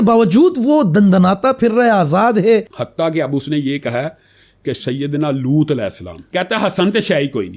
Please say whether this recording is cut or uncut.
cut